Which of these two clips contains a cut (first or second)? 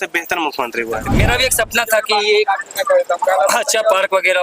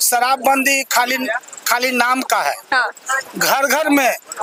first